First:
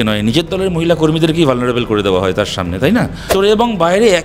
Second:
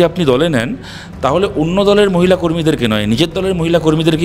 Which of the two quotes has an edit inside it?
first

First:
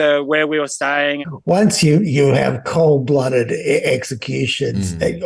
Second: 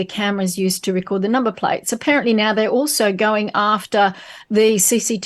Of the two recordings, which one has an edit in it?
first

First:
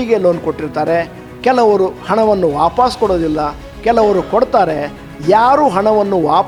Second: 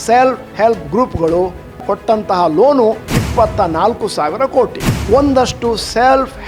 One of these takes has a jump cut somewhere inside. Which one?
second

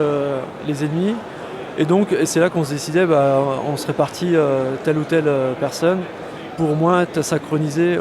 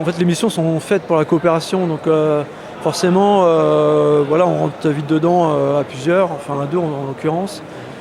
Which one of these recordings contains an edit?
first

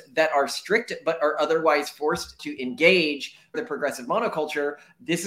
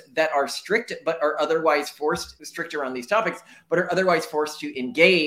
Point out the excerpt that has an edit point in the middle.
first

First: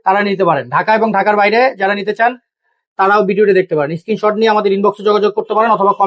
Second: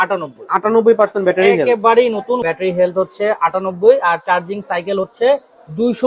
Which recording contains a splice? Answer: second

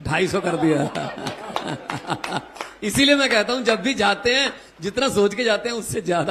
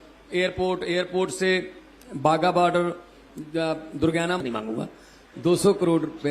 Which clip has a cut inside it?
second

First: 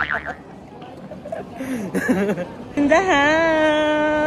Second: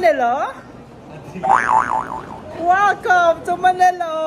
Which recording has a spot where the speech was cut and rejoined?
first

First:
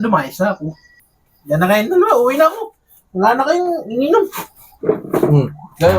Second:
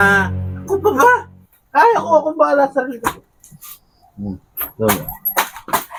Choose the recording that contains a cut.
first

